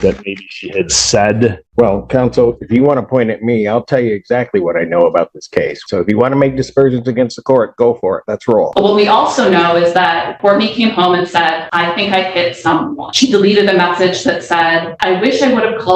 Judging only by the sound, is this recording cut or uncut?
cut